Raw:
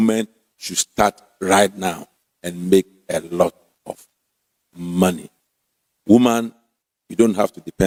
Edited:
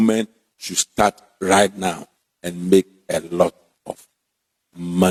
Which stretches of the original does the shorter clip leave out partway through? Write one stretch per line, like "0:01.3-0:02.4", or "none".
none

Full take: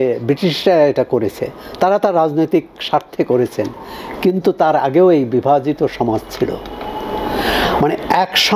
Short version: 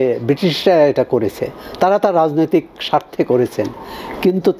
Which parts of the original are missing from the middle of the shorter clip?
none

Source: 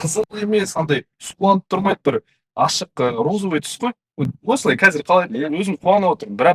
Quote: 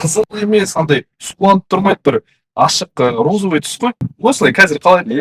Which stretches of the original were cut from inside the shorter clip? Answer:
0:04.1-0:04.3

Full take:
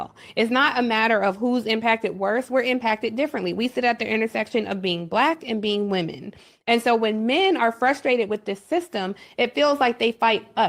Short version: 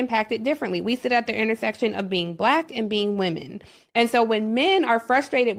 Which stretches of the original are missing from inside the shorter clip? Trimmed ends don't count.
none

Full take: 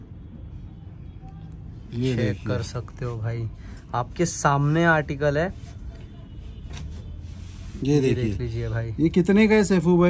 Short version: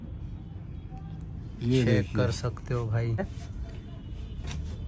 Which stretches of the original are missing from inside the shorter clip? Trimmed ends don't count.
0:03.7-0:05.7

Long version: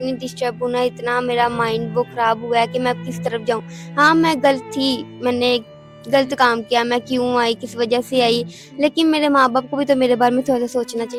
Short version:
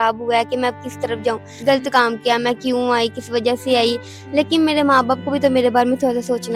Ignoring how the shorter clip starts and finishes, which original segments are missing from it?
0:03.7-0:05.9

